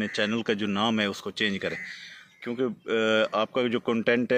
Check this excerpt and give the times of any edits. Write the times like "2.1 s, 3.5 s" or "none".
none